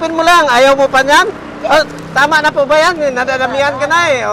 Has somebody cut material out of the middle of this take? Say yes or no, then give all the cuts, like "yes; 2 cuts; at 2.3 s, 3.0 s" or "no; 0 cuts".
no; 0 cuts